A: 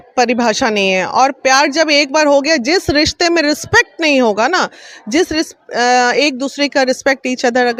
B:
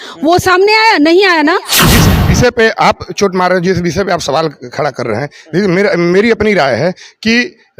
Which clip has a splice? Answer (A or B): B